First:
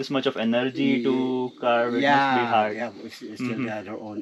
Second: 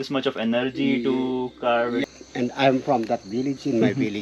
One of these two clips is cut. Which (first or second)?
second